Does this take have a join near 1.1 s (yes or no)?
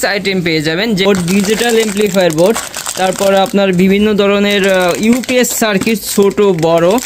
yes